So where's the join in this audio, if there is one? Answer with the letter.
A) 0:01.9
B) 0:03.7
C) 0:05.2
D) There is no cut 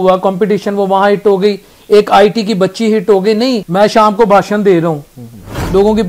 B